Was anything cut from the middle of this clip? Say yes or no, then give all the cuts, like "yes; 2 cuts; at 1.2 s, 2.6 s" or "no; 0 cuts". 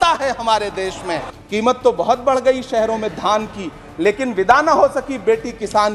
yes; 1 cut; at 1.3 s